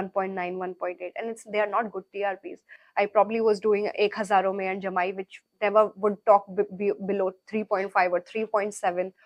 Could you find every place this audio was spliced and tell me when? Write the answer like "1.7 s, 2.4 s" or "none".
none